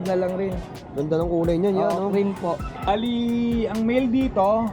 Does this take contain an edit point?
yes; 1 cut; at 2.9 s

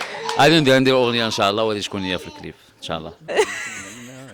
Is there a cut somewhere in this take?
yes; 1 cut; at 3.2 s

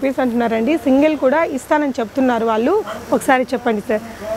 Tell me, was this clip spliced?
no; 0 cuts

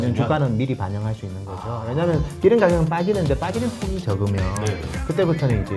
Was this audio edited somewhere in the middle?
no; 0 cuts

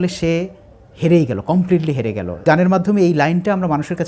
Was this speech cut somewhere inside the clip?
yes; 1 cut; at 2.4 s

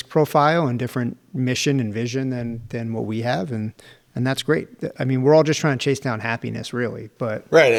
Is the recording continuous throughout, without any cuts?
yes; 0 cuts

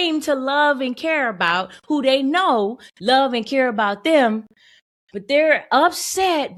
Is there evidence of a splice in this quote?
no; 0 cuts

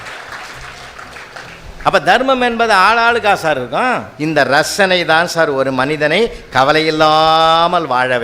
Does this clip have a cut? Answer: yes; 1 cut; at 4.1 s

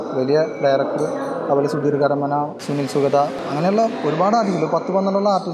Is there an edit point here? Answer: yes; 2 cuts; at 2.6 s, 3.4 s

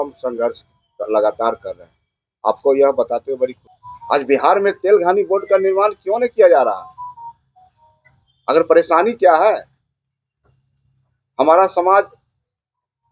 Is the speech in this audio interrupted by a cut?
yes; 1 cut; at 3.7 s

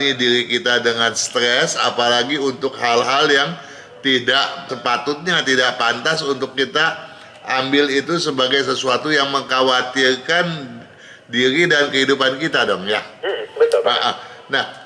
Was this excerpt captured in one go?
yes; 0 cuts

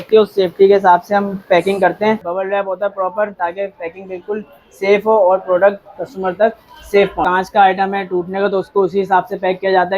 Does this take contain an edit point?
yes; 2 cuts; at 2.3 s, 7.2 s

